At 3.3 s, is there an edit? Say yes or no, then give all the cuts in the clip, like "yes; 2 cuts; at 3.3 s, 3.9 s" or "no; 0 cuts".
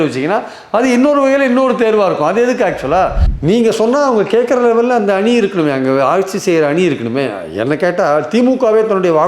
yes; 1 cut; at 3.3 s